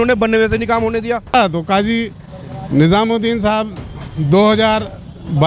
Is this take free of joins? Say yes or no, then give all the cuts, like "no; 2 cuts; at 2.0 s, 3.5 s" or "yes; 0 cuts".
no; 1 cut; at 1.3 s